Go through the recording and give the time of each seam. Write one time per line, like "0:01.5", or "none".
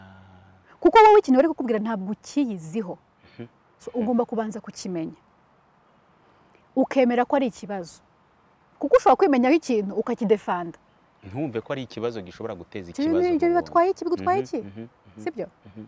none

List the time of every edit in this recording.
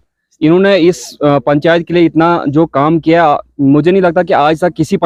none

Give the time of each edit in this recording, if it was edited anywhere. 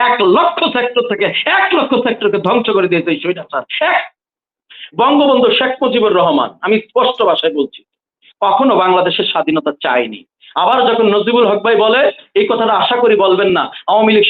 0:04.1

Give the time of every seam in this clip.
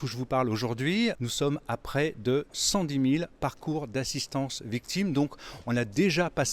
0:01.2

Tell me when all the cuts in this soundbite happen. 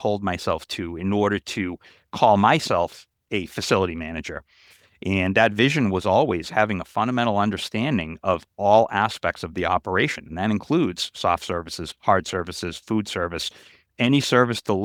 none

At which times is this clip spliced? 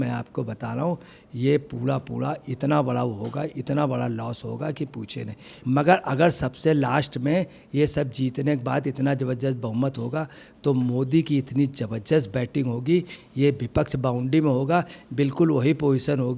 0:05.4

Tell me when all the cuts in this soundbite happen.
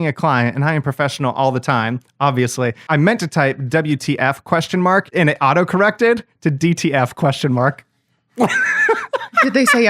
0:02.9
0:05.1

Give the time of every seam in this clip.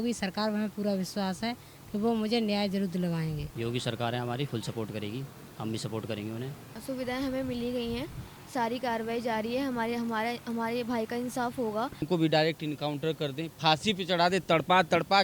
0:03.5
0:06.8
0:12.1

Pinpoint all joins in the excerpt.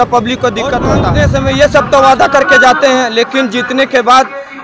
0:01.0

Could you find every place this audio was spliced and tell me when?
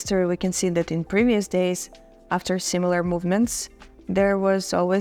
none

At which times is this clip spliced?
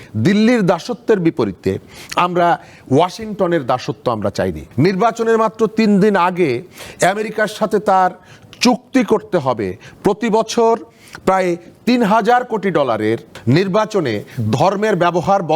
0:04.6
0:13.3

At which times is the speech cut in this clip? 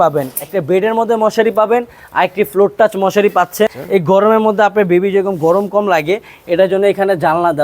0:03.8

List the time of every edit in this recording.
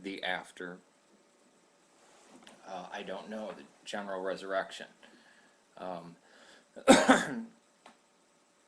0:05.8

